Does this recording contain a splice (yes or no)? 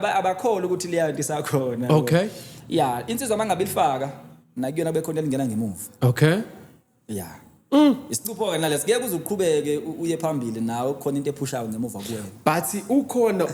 no